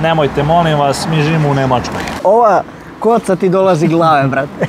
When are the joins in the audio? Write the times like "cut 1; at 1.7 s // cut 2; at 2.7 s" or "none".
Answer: cut 1; at 2.2 s